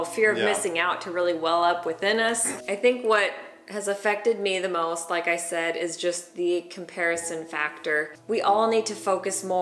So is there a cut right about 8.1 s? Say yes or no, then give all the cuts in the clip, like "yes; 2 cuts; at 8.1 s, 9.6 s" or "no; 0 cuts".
yes; 2 cuts; at 2.5 s, 8.1 s